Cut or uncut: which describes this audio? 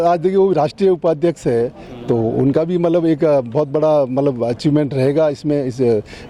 uncut